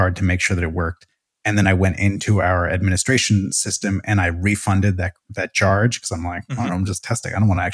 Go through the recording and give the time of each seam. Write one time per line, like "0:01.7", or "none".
none